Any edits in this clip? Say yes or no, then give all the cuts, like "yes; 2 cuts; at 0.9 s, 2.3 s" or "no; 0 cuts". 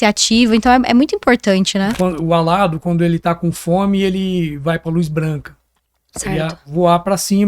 yes; 1 cut; at 1.9 s